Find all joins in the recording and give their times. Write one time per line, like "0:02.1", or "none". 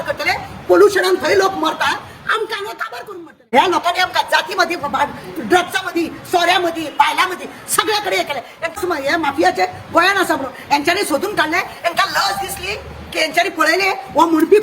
0:03.3
0:08.7